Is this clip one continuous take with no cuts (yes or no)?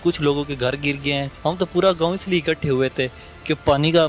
no